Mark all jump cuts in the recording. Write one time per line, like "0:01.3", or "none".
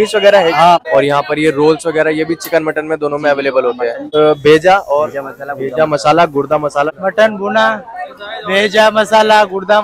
0:00.8
0:04.0